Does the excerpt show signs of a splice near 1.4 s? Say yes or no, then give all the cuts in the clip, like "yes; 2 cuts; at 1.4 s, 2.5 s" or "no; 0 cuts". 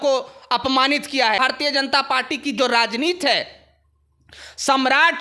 yes; 1 cut; at 1.4 s